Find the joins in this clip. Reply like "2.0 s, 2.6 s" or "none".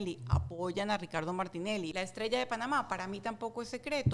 1.9 s